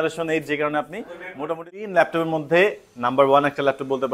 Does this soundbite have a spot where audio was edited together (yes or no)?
yes